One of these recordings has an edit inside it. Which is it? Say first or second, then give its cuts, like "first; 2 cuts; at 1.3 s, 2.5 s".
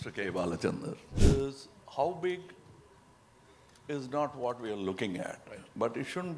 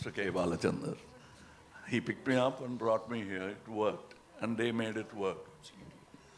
first; 1 cut; at 1.1 s